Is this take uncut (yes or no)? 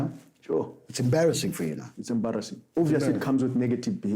yes